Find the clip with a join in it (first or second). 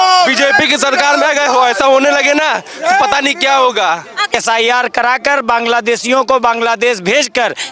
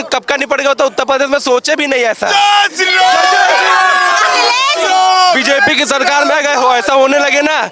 first